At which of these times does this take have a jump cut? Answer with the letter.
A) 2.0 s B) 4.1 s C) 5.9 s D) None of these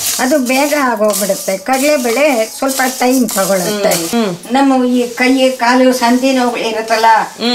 B